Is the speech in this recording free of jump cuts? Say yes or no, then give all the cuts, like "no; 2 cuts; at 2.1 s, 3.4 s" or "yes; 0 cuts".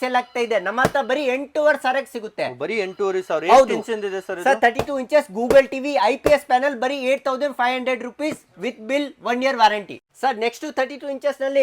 yes; 0 cuts